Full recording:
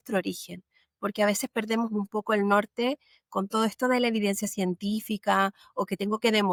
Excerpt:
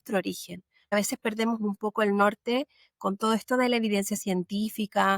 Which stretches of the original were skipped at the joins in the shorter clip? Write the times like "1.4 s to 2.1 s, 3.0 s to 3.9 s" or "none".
0.9 s to 1.2 s

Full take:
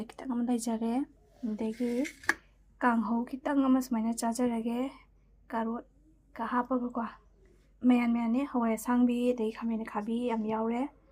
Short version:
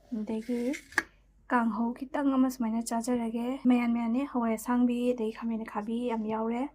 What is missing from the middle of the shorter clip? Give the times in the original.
4.9 s to 7.8 s

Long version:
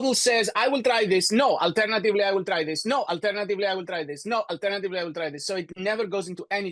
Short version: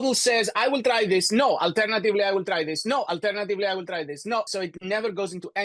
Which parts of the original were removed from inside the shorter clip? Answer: 4.5 s to 5.4 s

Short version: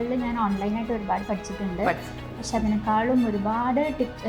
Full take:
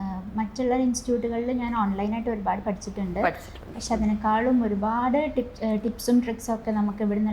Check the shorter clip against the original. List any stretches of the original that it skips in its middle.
none

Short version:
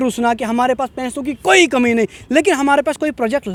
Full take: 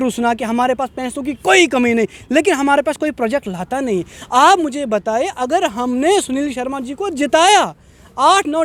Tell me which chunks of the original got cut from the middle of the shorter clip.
none

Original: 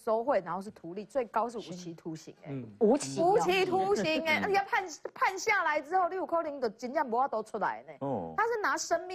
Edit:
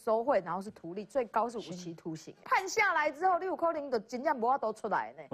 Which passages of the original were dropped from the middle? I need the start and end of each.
2.3 s to 5.0 s

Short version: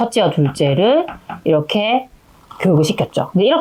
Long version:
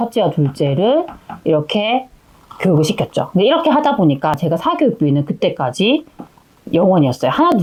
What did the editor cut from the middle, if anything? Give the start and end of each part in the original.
none

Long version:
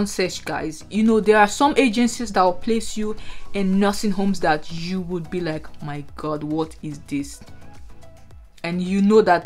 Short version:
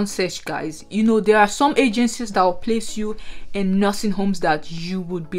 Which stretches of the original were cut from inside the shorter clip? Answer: none

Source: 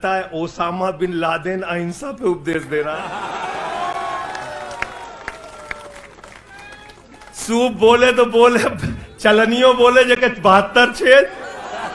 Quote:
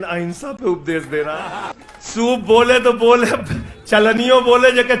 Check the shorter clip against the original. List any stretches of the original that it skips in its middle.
3.3 s to 7.0 s

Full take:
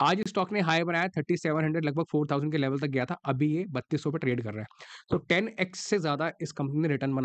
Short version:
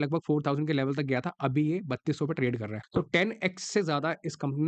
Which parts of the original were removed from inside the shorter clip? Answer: 4.6 s to 4.9 s

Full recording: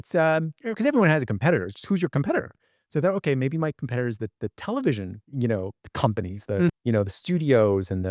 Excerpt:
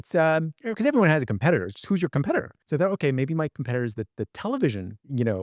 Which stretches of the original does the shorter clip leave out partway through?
2.6 s to 2.8 s

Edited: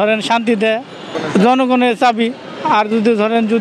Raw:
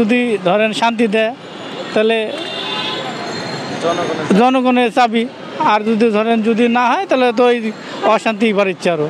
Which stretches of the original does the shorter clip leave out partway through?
1.7 s to 4.1 s

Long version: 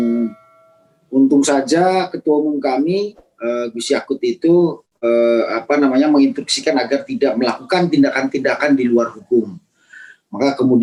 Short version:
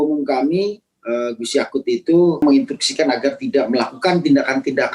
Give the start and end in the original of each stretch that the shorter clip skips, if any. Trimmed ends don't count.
4.8 s to 6.1 s

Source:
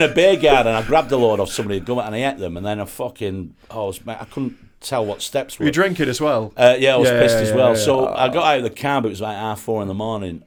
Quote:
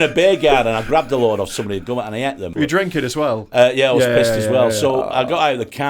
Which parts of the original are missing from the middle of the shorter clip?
2.5 s to 5.5 s

